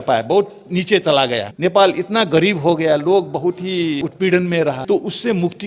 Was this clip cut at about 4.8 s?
yes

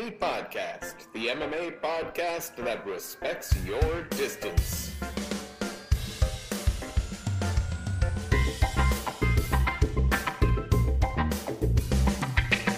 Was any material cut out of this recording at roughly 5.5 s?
no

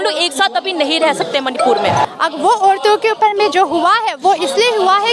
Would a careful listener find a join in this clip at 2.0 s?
yes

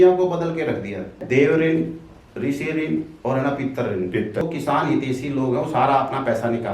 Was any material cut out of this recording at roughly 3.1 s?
no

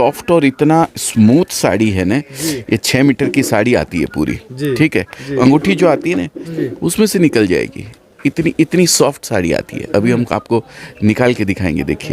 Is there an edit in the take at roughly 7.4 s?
no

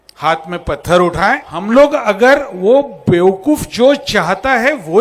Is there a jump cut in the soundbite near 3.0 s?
no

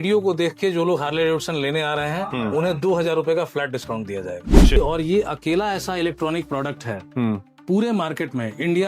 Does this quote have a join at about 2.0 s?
no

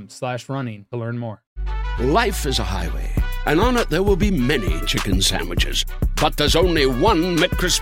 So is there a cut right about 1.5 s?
yes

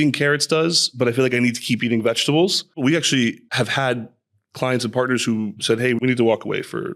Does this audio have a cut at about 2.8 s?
yes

